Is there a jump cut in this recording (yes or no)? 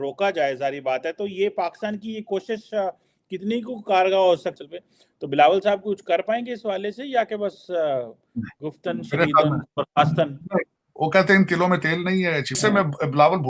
yes